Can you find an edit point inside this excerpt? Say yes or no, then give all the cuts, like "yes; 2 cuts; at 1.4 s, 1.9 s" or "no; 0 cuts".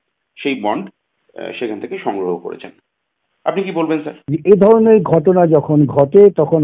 yes; 1 cut; at 4.2 s